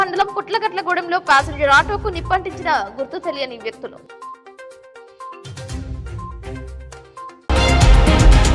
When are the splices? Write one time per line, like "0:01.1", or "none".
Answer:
0:07.3